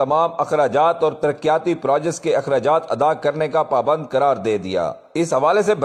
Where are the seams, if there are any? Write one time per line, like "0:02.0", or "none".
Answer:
none